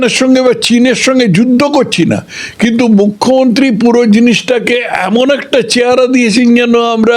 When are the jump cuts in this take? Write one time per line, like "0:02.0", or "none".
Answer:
none